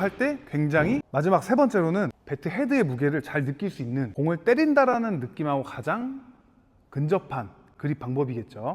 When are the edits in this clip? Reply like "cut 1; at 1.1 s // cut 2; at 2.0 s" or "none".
cut 1; at 1.1 s // cut 2; at 2.2 s // cut 3; at 4.1 s

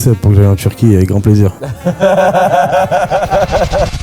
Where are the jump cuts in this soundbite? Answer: cut 1; at 1.7 s

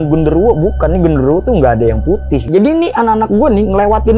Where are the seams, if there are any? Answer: cut 1; at 2.4 s

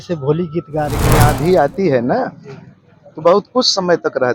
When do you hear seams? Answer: cut 1; at 1.1 s

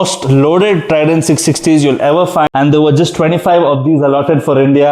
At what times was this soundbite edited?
cut 1; at 2.5 s

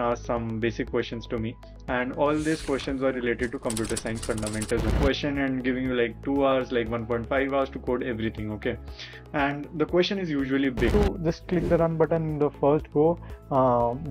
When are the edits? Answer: cut 1; at 4.9 s // cut 2; at 10.9 s

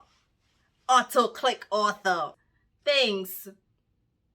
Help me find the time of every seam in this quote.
cut 1; at 2.4 s

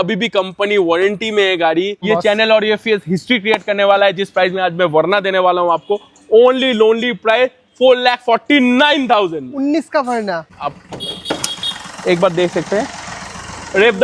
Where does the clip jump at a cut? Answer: cut 1; at 2.0 s // cut 2; at 10.5 s

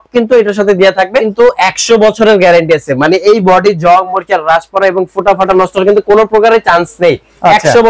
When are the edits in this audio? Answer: cut 1; at 1.3 s

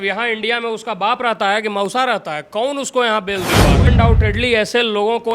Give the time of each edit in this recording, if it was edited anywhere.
cut 1; at 3.9 s

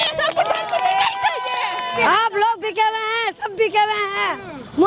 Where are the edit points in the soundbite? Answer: cut 1; at 1.9 s

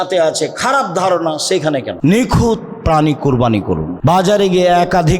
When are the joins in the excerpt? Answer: cut 1; at 1.9 s // cut 2; at 3.9 s

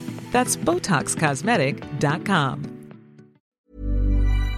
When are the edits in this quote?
cut 1; at 3.7 s

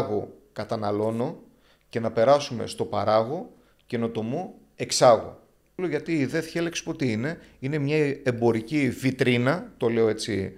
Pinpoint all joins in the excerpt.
cut 1; at 5.7 s

